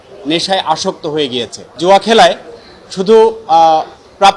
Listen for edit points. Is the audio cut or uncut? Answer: cut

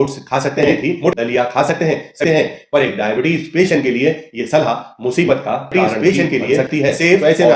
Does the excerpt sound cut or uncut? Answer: cut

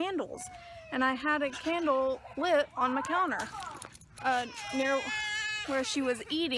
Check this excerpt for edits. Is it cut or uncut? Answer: uncut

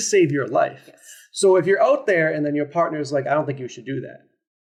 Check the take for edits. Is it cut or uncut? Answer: uncut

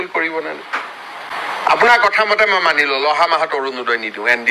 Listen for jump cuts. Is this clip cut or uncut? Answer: cut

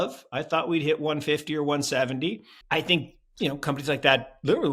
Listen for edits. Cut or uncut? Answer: cut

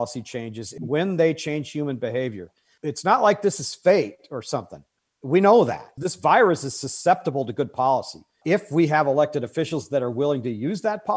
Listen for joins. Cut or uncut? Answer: uncut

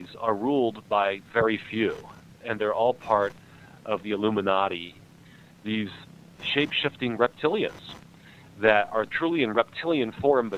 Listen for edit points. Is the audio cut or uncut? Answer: cut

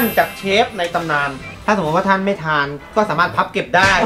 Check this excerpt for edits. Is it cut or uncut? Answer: cut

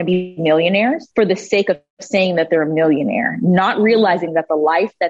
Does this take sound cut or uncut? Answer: cut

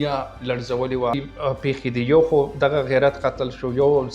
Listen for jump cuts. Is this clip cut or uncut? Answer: cut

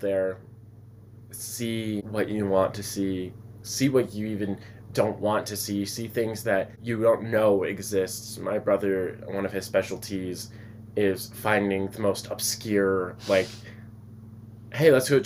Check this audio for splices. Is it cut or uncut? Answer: uncut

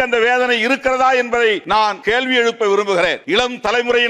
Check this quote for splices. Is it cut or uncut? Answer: cut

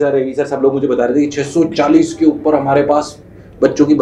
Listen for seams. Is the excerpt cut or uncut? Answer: uncut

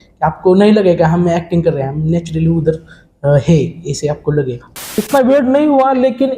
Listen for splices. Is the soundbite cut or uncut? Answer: cut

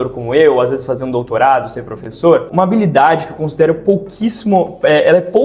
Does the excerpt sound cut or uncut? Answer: cut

